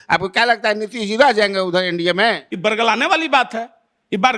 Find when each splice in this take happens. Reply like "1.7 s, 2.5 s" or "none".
2.5 s